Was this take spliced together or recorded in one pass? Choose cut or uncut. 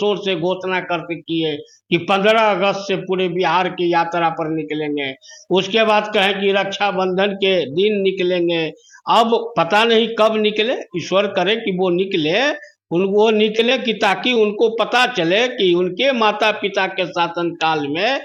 uncut